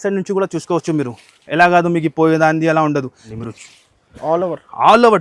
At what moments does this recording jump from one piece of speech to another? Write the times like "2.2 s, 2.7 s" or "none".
3.2 s